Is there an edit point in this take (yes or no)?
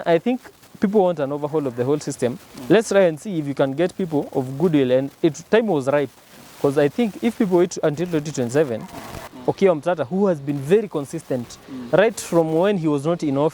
yes